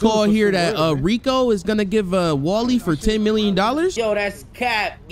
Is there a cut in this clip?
yes; 1 cut; at 3.9 s

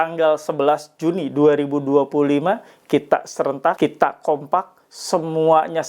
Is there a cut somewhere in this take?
yes; 1 cut; at 3.8 s

